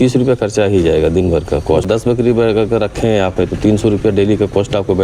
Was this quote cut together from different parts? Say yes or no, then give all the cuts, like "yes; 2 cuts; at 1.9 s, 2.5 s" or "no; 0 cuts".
yes; 1 cut; at 2.0 s